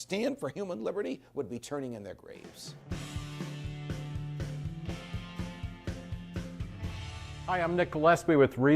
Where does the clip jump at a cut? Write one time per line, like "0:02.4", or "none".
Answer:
0:02.3

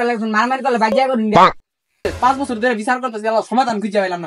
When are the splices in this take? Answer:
0:02.0

